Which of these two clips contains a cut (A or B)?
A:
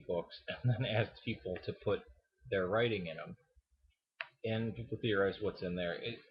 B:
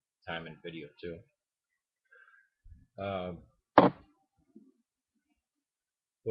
A